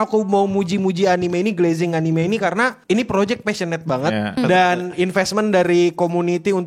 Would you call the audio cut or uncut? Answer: cut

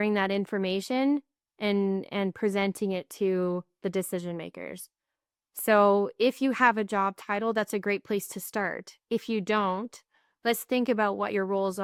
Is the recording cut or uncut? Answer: uncut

